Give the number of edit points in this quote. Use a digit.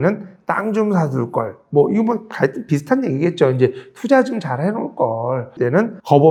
0